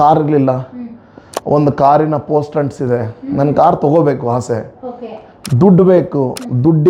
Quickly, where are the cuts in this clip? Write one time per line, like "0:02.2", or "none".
none